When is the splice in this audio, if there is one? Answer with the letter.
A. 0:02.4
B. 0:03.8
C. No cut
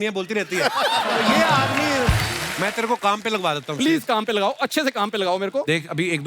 A